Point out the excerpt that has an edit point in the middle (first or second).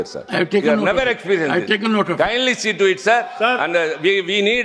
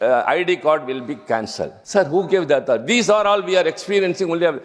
second